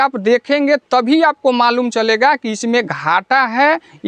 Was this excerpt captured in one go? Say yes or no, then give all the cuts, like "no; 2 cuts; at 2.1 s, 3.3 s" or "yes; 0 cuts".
yes; 0 cuts